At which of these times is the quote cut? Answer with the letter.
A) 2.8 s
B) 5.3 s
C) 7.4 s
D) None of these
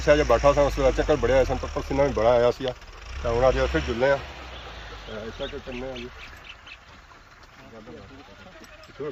D